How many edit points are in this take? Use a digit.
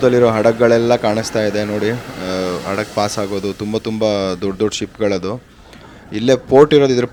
0